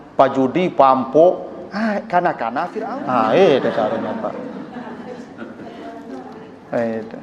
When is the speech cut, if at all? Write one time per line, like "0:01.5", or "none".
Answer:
0:02.7